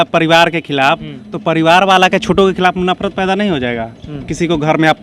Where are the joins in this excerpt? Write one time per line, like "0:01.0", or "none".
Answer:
none